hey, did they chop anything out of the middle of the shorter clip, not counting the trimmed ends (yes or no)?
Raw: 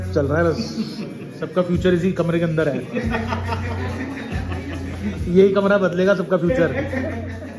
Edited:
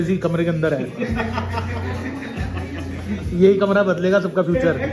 no